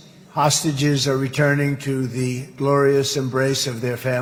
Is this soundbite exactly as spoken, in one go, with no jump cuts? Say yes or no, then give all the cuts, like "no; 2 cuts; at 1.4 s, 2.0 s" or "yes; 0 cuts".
yes; 0 cuts